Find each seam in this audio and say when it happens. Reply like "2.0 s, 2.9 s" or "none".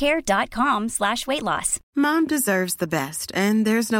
1.8 s